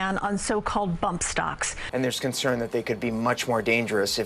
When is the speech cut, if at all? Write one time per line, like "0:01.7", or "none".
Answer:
0:01.8

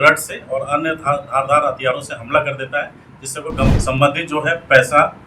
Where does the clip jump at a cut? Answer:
0:03.8

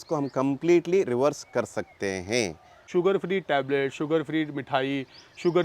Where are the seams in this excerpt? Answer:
0:02.8

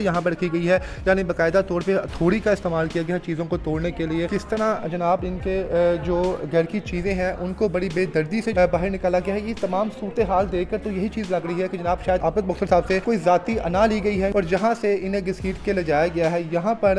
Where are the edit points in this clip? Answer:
0:04.3
0:08.5
0:12.2
0:13.0
0:14.3

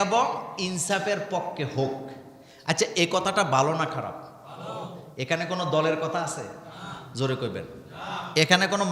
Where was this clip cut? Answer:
none

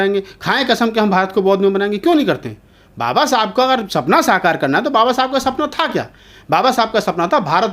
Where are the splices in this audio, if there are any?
none

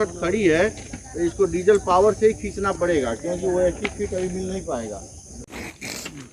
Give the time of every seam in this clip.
none

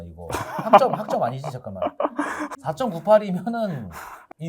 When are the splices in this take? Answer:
0:02.5

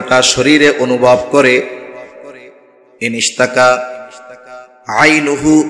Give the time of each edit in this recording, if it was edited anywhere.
none

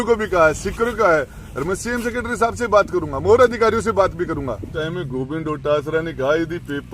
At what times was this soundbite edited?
0:04.7

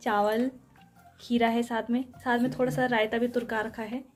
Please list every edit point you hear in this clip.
none

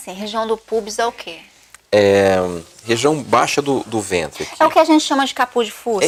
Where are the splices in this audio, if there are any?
none

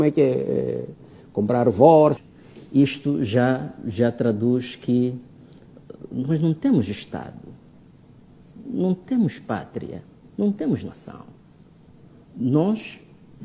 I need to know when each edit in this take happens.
0:02.2

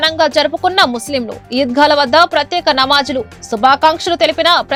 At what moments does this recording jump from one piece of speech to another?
none

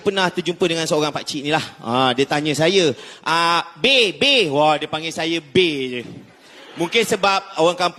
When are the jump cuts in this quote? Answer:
none

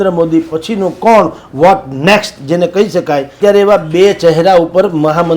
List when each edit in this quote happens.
0:03.3

